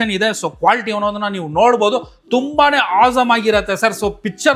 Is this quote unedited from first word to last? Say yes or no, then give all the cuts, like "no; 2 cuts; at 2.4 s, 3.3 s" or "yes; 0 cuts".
yes; 0 cuts